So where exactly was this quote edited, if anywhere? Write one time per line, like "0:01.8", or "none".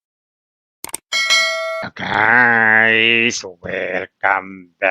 0:01.8